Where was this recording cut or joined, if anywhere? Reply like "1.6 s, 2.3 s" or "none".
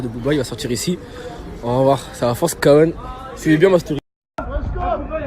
4.1 s